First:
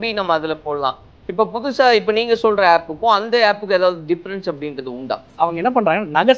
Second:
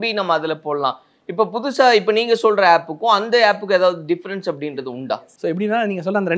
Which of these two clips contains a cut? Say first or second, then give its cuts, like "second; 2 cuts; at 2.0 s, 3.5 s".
first; 1 cut; at 5.3 s